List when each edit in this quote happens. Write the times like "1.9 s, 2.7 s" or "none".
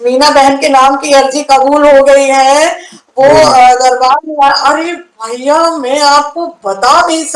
none